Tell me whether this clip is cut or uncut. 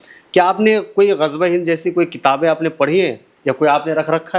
uncut